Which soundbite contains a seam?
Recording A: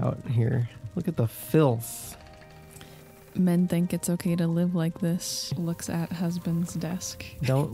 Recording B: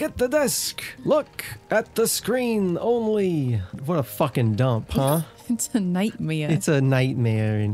B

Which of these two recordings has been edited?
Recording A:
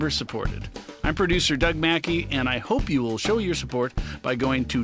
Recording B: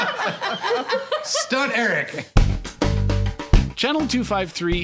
B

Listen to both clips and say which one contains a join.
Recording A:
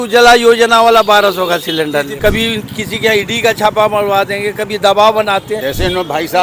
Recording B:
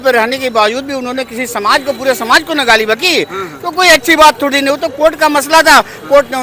A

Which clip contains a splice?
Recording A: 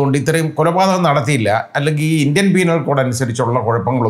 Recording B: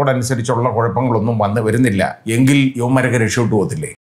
B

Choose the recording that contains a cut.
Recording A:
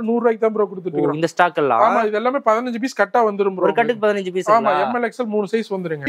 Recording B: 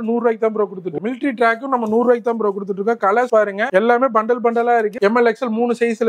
B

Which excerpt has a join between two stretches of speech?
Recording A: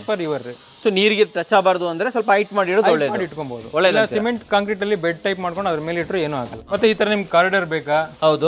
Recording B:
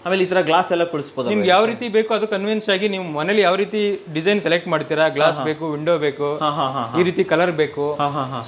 A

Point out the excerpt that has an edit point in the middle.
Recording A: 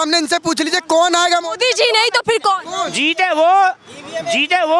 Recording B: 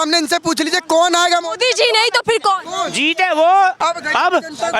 B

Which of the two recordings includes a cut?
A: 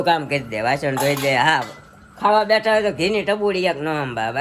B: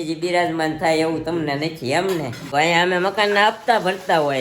B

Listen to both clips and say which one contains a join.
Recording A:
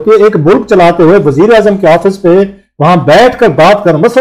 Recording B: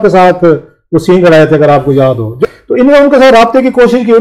B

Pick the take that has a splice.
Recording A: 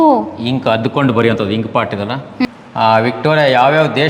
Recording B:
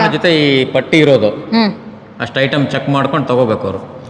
A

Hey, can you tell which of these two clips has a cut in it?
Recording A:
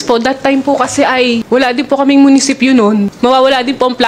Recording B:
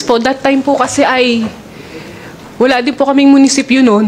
A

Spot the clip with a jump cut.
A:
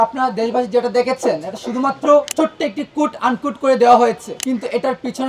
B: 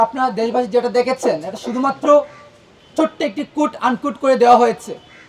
A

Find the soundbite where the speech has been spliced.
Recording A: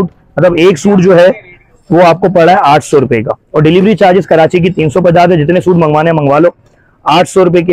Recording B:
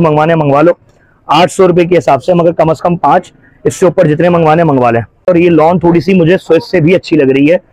B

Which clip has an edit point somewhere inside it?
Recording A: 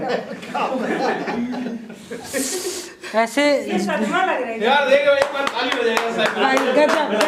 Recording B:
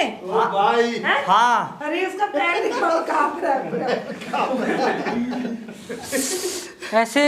B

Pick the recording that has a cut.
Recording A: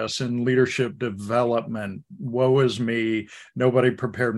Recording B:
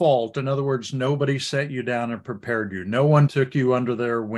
B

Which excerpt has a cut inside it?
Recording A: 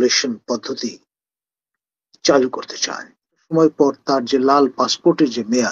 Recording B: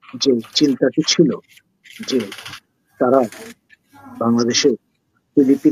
A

